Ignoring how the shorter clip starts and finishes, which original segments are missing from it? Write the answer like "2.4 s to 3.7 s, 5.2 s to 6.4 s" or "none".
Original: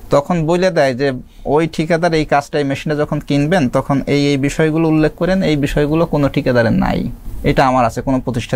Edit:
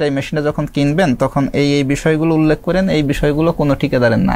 none